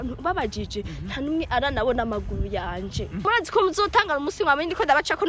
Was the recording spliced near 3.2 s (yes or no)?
yes